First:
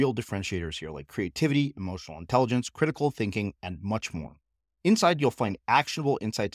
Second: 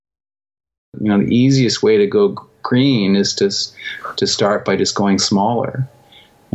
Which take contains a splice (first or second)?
second